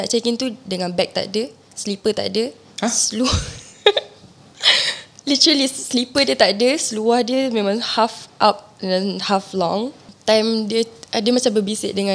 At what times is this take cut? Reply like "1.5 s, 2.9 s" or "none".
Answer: 10.0 s